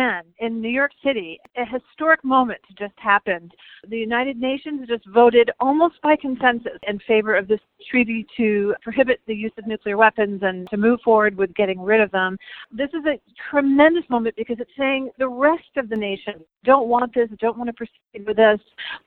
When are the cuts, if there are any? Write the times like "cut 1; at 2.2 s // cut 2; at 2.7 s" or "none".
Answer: cut 1; at 1.4 s // cut 2; at 6.9 s // cut 3; at 10.6 s // cut 4; at 12.6 s